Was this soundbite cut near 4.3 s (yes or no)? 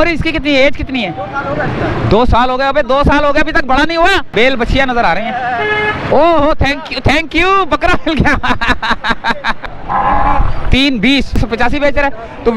yes